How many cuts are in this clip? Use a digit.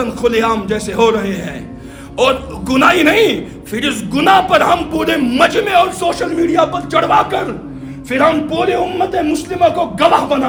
0